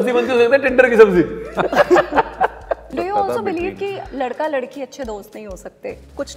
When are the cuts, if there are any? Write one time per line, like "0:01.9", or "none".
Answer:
0:02.8

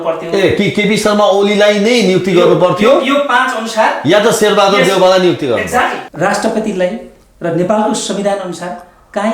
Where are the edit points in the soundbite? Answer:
0:06.0

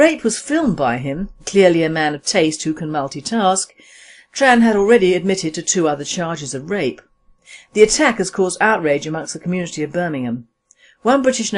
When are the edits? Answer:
0:10.1

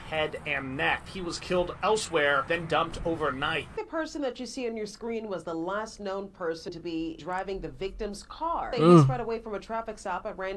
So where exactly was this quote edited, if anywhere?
0:01.1
0:02.4
0:03.8
0:07.1
0:08.7

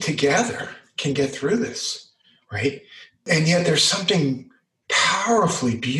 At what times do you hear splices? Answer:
none

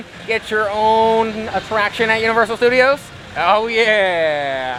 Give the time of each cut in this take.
none

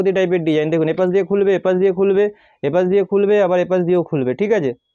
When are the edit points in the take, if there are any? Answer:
none

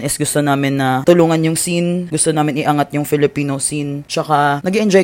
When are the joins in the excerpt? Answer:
none

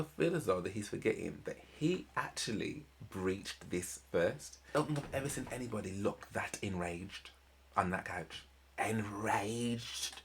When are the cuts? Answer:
0:04.7

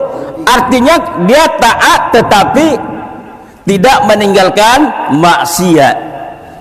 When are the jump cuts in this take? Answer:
none

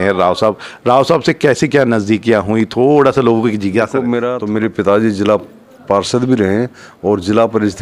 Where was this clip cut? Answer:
0:04.3

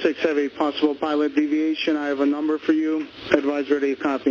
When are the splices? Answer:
none

